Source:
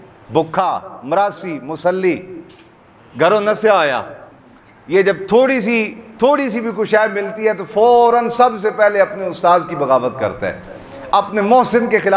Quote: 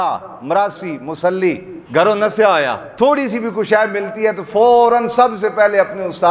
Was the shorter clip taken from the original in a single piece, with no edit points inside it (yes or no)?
no